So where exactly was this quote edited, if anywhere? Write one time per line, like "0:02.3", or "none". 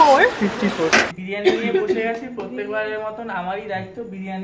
0:01.2